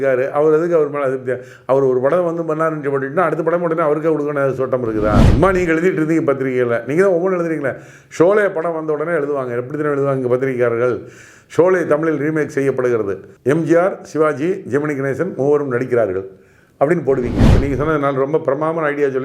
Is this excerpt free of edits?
no; 3 cuts; at 5.3 s, 13.2 s, 17.6 s

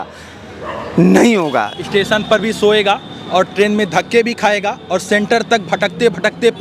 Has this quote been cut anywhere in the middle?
yes; 1 cut; at 1.7 s

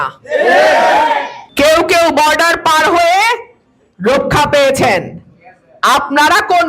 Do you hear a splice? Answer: yes; 1 cut; at 1.4 s

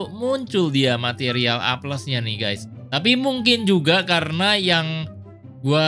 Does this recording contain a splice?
yes; 1 cut; at 2.7 s

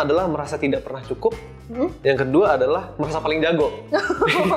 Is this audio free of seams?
yes; 0 cuts

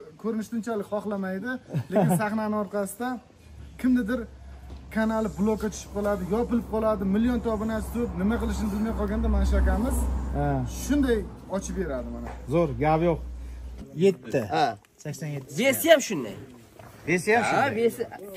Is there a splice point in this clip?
yes; 1 cut; at 13.9 s

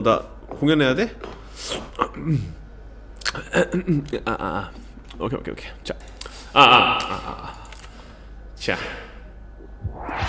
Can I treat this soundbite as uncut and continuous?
yes; 0 cuts

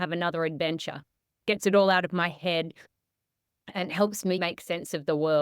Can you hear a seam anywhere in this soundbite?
yes; 1 cut; at 4.4 s

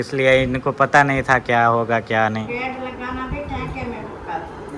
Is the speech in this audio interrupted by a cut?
yes; 1 cut; at 2.5 s

